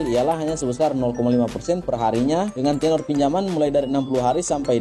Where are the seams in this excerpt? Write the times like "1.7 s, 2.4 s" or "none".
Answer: none